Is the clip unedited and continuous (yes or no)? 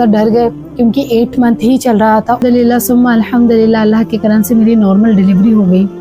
no